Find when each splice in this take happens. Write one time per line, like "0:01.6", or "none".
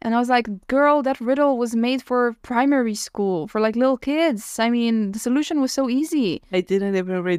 0:02.4
0:06.4